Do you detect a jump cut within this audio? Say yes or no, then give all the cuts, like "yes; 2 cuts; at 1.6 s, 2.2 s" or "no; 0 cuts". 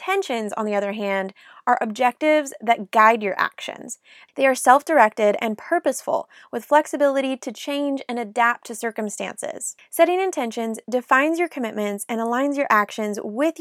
no; 0 cuts